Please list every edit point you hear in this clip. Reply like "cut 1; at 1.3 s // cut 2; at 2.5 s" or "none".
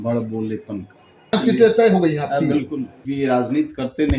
cut 1; at 1.3 s // cut 2; at 2.9 s

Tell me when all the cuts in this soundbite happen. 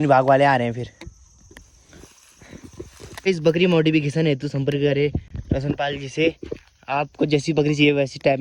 cut 1; at 3.2 s

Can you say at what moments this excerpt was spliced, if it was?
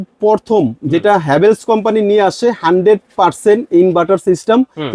none

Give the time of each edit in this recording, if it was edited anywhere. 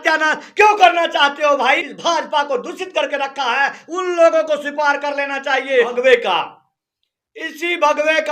cut 1; at 1.8 s // cut 2; at 5.9 s

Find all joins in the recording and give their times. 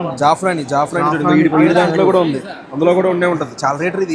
none

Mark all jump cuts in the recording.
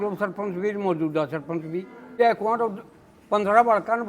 cut 1; at 2.2 s

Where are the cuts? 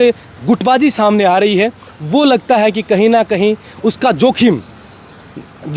none

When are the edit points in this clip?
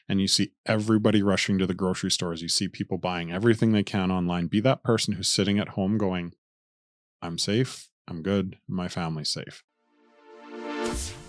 cut 1; at 9.6 s

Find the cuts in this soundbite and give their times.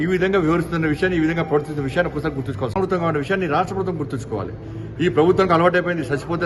cut 1; at 2.8 s

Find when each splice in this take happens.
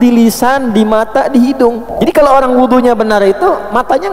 cut 1; at 1.9 s

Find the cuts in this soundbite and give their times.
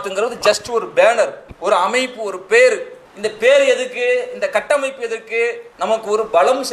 cut 1; at 1.5 s // cut 2; at 5.7 s

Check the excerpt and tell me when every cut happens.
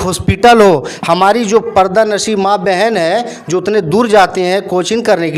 none

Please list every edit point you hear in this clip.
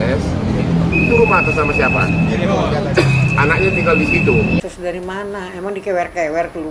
cut 1; at 4.6 s

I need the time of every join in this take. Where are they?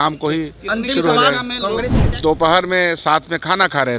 cut 1; at 2.0 s

